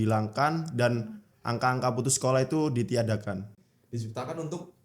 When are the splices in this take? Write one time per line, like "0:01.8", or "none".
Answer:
0:03.6